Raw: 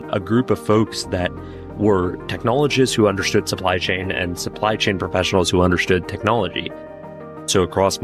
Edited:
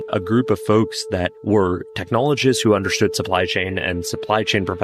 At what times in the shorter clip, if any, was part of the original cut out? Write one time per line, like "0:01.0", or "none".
0:01.3